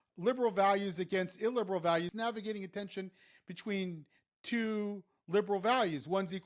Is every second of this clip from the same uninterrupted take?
no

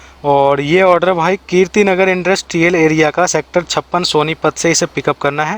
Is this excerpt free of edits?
yes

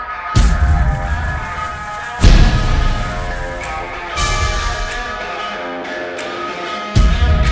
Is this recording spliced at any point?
no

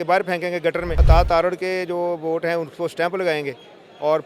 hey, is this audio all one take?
no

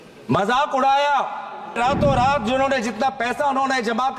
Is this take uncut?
no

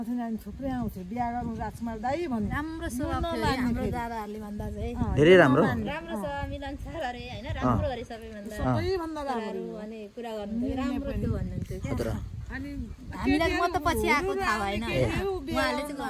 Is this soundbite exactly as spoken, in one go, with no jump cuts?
yes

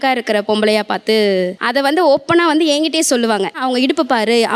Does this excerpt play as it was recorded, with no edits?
yes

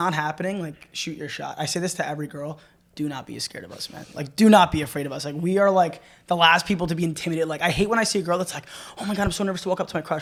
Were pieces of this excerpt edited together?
no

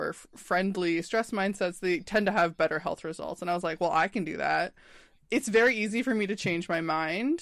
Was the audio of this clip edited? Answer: no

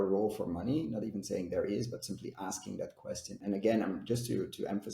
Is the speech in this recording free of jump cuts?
no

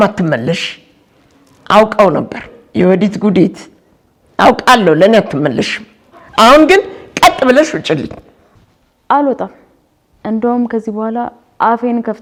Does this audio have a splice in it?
no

